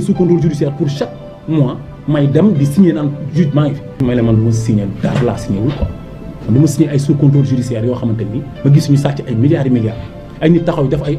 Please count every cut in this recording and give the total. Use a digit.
1